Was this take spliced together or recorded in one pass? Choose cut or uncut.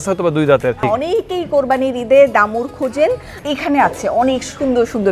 cut